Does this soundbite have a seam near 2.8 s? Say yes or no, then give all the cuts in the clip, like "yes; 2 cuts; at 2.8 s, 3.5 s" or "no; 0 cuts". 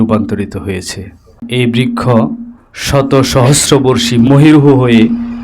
no; 2 cuts; at 1.4 s, 4.3 s